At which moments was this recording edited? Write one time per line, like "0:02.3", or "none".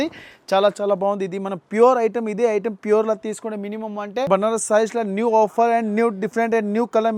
0:04.3